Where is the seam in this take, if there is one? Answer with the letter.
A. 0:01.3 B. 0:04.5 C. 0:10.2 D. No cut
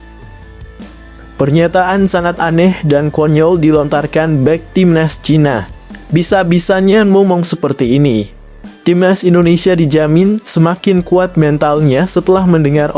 A